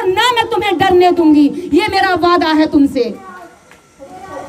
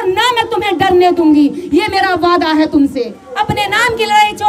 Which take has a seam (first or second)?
second